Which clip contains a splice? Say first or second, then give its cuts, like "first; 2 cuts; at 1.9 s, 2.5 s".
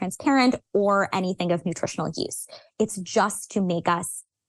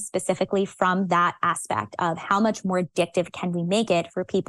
second; 1 cut; at 2.6 s